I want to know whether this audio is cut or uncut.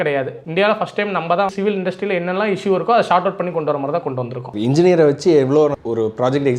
cut